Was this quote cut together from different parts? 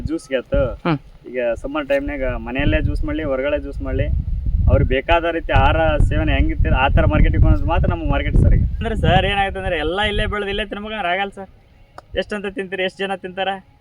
yes; 1 cut; at 8.9 s

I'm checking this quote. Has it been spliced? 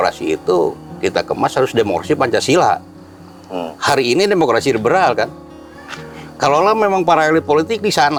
no; 0 cuts

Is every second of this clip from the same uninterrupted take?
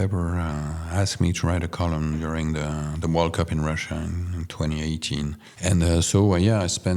no; 1 cut; at 5.5 s

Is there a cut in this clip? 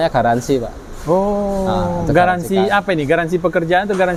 no; 0 cuts

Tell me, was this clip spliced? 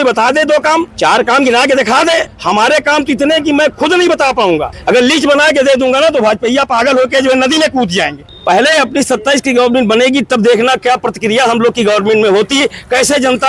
yes; 4 cuts; at 0.9 s, 2.3 s, 4.7 s, 8.2 s

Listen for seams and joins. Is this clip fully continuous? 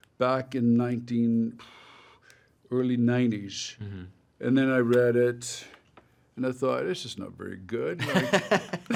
yes; 0 cuts

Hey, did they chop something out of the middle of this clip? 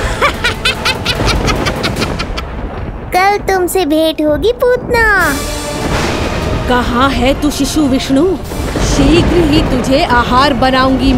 no; 0 cuts

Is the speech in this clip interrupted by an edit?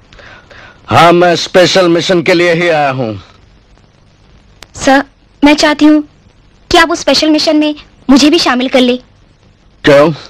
no; 0 cuts

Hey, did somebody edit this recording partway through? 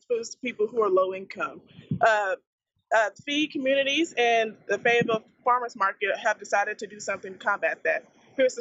no; 0 cuts

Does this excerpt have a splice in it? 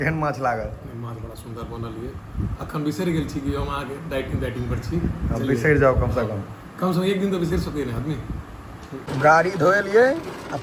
no; 0 cuts

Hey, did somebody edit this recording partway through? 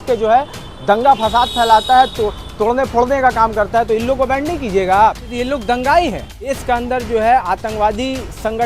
yes; 2 cuts; at 5.3 s, 6.6 s

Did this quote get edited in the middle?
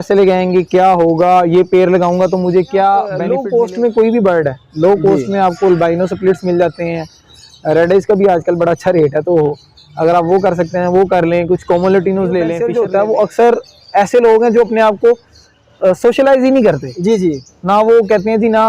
yes; 2 cuts; at 3.2 s, 12.6 s

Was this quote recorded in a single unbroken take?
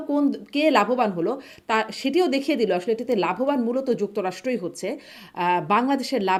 yes; 0 cuts

